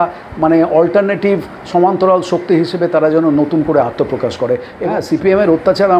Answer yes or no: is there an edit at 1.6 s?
no